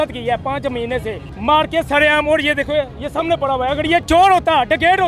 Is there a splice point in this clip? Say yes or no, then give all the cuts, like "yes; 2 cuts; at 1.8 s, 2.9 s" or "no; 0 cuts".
yes; 2 cuts; at 1.2 s, 4.0 s